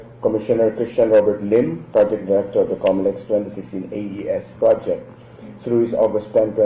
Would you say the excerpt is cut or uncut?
cut